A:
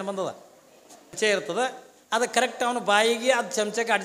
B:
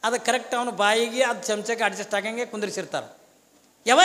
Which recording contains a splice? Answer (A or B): A